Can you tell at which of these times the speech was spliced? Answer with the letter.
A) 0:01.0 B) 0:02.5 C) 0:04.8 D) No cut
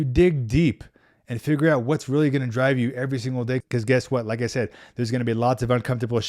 D